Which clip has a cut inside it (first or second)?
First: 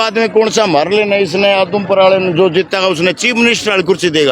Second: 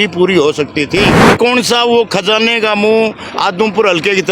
second